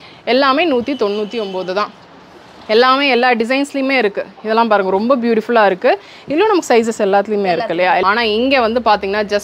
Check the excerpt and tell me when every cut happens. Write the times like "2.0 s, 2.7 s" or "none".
8.0 s